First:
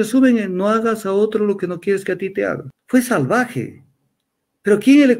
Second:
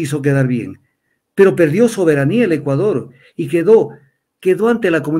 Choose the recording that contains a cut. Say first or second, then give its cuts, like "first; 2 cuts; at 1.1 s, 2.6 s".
first; 1 cut; at 2.7 s